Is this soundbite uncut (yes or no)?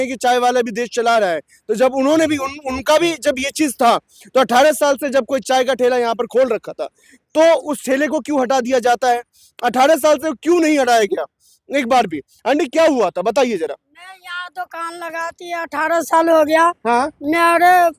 yes